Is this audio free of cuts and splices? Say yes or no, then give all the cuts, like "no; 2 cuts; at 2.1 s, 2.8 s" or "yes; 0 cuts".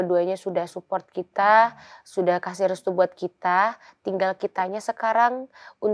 yes; 0 cuts